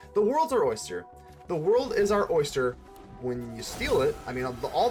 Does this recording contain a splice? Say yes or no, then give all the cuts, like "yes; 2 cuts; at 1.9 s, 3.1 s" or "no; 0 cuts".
no; 0 cuts